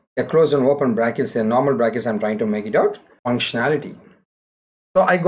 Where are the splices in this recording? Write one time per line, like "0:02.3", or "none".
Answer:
0:03.1